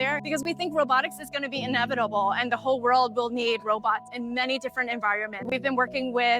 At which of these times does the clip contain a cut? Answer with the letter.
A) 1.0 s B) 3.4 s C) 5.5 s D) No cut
C